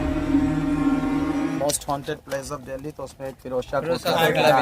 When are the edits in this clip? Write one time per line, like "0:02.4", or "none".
0:01.6